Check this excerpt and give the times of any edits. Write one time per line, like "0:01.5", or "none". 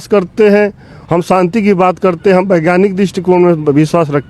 0:00.9